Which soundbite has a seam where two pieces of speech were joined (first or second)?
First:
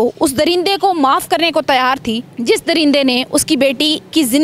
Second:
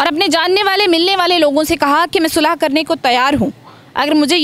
first